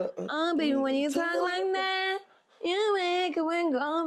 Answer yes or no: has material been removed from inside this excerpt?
no